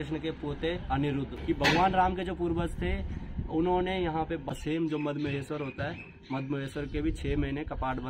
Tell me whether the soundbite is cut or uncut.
cut